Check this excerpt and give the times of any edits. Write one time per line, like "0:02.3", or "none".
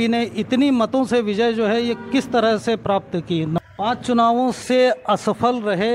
0:03.6